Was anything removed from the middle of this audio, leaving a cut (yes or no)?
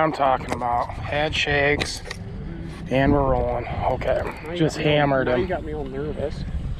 yes